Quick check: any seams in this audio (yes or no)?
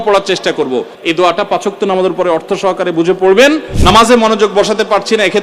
yes